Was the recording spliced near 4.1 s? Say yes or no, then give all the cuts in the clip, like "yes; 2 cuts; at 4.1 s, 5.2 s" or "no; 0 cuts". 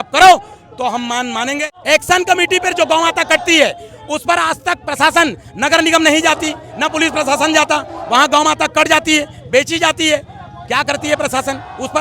no; 1 cut; at 1.6 s